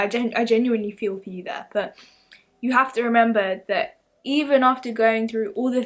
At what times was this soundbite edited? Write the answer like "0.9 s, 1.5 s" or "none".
none